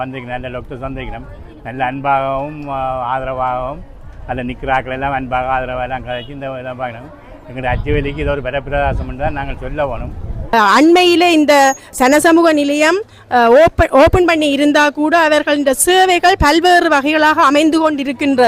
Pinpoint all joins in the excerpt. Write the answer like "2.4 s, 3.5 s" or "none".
10.5 s